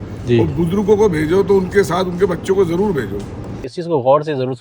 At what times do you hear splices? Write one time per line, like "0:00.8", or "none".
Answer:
0:03.6